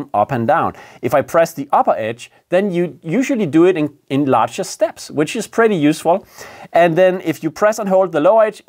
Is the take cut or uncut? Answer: uncut